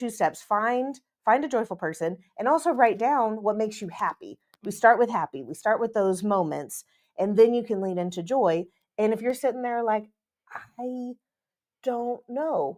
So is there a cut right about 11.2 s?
no; 0 cuts

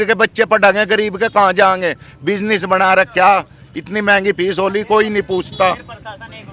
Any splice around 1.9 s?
no; 0 cuts

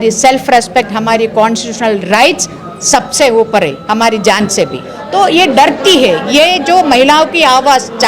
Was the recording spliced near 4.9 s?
yes; 1 cut; at 4.9 s

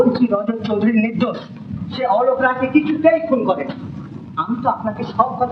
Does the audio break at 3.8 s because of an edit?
no; 0 cuts

